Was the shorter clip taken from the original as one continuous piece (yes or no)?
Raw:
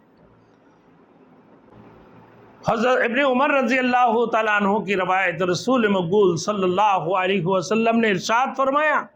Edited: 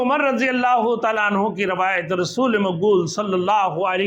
yes